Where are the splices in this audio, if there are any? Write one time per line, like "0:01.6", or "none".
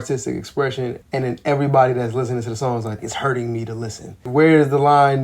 0:01.0
0:03.0
0:04.2